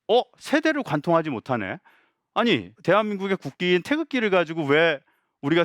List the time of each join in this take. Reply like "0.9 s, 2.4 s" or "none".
2.7 s